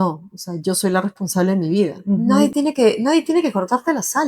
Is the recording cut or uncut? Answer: cut